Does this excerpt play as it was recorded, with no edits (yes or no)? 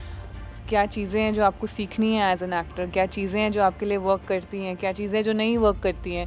yes